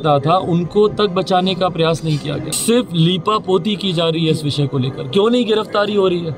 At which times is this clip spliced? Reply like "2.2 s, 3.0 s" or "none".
2.5 s